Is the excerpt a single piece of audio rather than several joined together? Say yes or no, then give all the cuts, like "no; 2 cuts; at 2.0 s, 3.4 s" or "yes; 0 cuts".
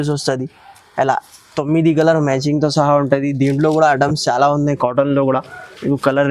yes; 0 cuts